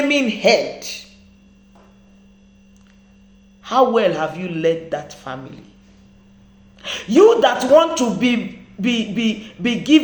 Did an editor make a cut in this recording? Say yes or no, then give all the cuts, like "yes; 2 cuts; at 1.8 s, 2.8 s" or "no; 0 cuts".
no; 0 cuts